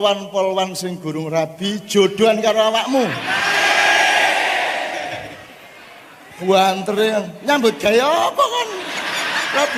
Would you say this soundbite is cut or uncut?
uncut